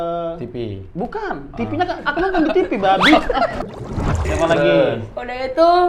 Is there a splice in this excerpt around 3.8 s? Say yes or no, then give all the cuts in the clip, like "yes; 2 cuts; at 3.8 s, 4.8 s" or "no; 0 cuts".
yes; 1 cut; at 3.8 s